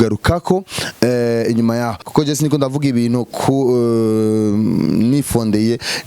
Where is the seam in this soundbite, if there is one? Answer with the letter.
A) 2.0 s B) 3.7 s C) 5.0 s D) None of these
A